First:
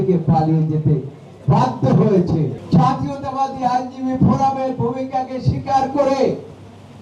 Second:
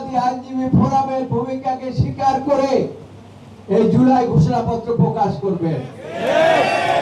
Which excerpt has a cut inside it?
first; 1 cut; at 2.6 s

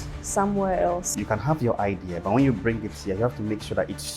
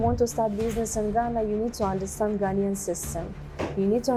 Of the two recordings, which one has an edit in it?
first; 1 cut; at 1.2 s

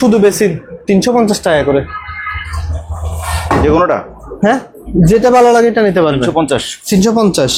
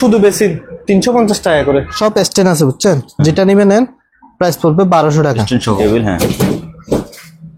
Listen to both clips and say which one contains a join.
second; 2 cuts; at 2.0 s, 5.8 s

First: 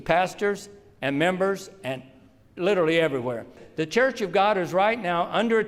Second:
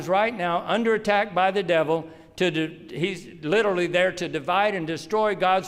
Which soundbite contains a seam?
first; 1 cut; at 3.6 s

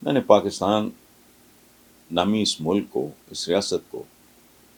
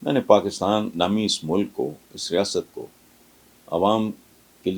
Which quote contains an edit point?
second; 1 cut; at 0.9 s

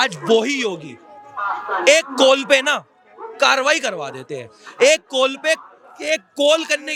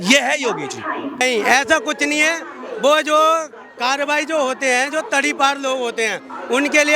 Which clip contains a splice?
second; 1 cut; at 1.2 s

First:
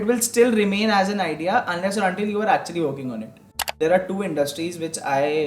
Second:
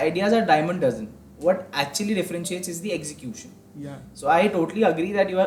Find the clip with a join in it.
first; 1 cut; at 3.6 s

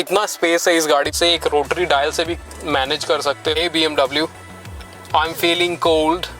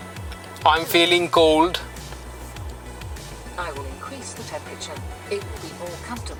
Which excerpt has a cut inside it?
first; 2 cuts; at 1.1 s, 3.5 s

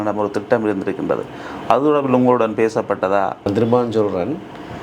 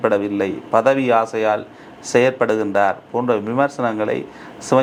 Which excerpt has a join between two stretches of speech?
first; 1 cut; at 3.5 s

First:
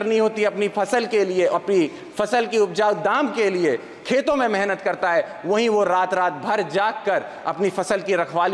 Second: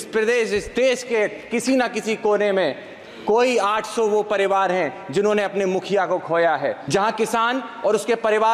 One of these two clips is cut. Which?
second; 1 cut; at 6.8 s

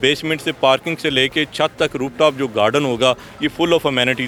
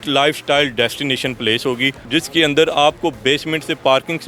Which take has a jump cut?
second; 1 cut; at 2.0 s

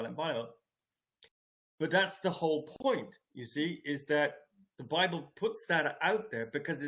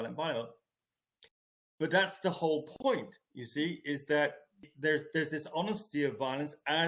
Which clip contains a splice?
second; 1 cut; at 4.6 s

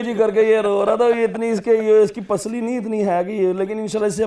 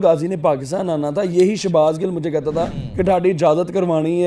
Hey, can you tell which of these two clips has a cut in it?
second; 1 cut; at 2.8 s

